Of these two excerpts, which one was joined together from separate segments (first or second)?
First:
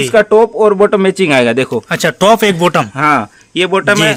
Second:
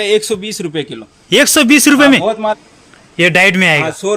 second